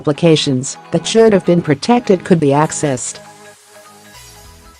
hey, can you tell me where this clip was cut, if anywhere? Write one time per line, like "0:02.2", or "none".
0:03.0